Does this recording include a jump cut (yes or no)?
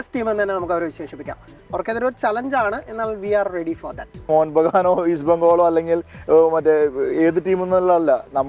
yes